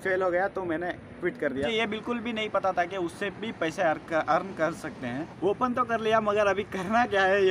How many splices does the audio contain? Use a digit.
2